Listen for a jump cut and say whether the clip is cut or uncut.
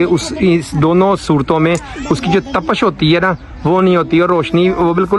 uncut